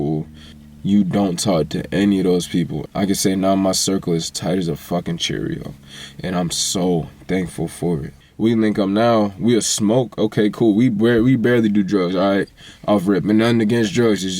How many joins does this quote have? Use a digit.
2